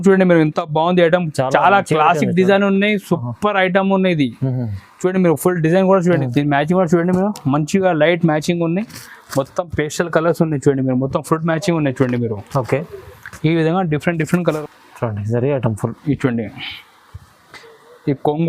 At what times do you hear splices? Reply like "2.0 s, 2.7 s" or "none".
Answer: 6.2 s, 14.6 s